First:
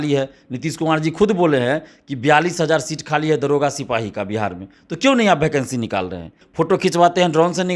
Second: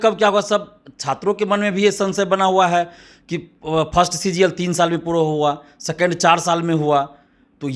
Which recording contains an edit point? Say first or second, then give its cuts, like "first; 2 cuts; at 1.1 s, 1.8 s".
first; 1 cut; at 6.4 s